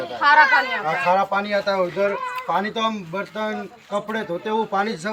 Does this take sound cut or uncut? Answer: uncut